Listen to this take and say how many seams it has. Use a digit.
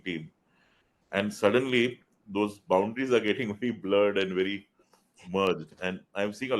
0